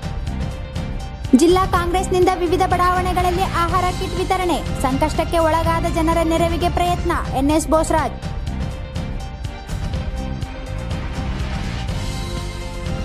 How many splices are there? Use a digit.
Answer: 1